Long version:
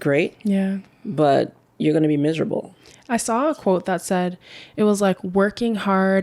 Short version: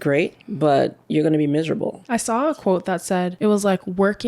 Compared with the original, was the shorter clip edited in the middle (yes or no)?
yes